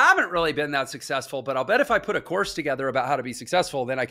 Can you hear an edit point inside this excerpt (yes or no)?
no